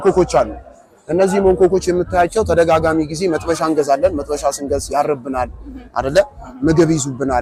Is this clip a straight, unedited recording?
yes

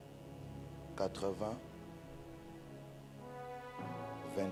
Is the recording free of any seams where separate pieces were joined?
yes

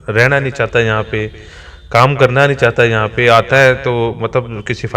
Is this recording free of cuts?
yes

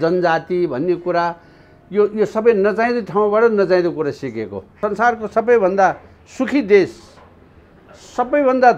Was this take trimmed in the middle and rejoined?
yes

